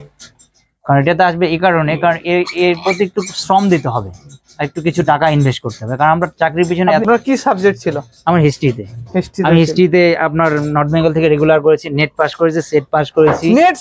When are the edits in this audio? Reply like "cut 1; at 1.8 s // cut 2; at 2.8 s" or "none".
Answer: cut 1; at 7.0 s